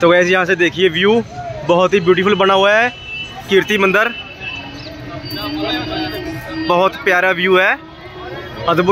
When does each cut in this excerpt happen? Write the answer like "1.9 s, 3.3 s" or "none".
none

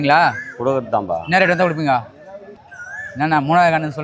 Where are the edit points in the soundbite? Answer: 2.6 s

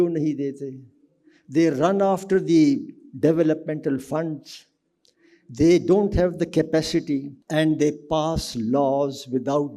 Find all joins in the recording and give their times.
7.4 s

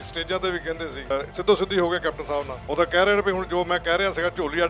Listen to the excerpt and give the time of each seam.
1.1 s, 2.6 s

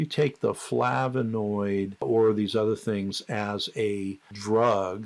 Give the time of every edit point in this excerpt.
2.0 s, 4.3 s

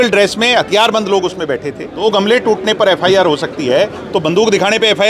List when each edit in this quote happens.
2.0 s

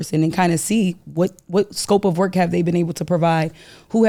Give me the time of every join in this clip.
none

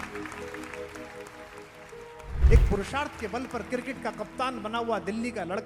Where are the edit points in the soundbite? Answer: 2.4 s

